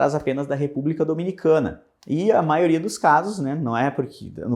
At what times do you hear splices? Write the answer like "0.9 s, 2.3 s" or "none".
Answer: none